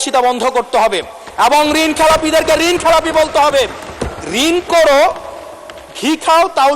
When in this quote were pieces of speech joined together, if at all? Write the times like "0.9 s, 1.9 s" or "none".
3.9 s